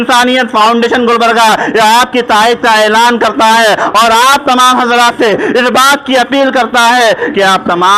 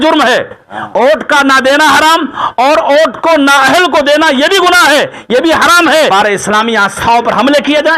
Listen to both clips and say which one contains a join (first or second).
second